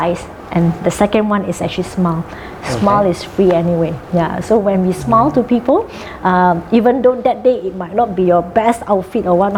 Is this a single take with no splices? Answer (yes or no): yes